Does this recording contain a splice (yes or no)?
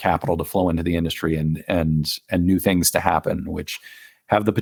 no